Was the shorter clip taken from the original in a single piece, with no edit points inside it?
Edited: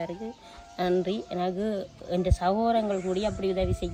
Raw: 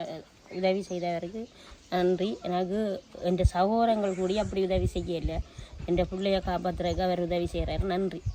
yes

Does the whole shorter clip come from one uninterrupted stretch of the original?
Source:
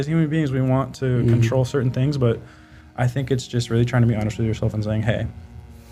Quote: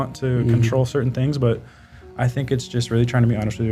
yes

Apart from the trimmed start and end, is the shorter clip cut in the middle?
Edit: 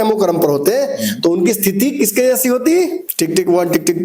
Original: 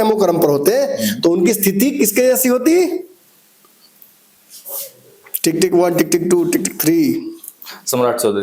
yes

